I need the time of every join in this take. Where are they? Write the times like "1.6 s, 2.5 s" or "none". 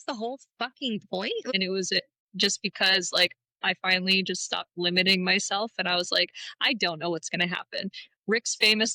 1.5 s